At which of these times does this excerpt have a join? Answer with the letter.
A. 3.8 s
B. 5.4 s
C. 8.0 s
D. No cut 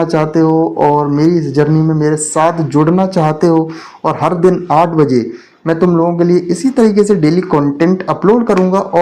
D